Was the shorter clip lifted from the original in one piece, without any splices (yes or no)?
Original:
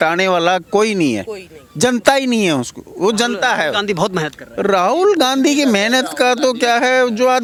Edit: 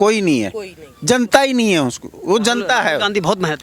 yes